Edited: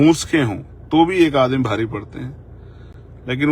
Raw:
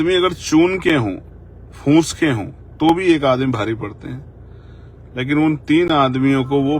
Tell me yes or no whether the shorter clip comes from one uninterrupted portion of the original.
yes